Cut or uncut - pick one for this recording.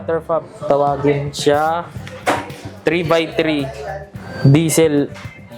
uncut